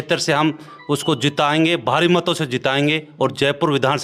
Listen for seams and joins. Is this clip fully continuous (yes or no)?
yes